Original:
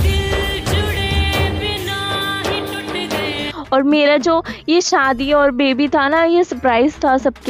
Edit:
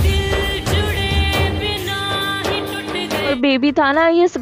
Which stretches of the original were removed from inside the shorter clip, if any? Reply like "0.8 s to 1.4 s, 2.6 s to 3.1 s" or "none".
3.3 s to 5.5 s